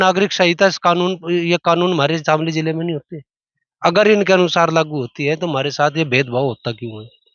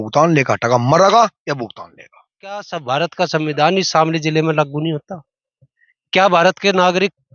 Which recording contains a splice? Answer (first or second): second